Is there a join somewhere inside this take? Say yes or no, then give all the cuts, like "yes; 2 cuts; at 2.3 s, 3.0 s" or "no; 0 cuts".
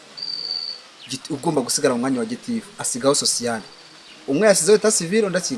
no; 0 cuts